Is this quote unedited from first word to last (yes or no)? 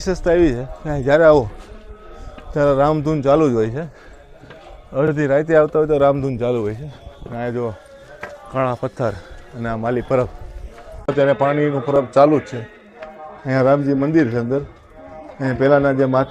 yes